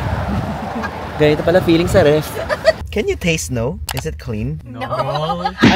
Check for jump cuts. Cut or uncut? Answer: cut